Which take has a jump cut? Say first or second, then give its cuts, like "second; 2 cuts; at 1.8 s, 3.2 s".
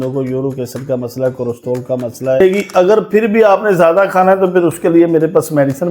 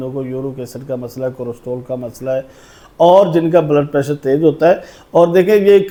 first; 1 cut; at 2.4 s